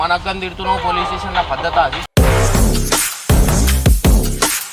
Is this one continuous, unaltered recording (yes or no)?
yes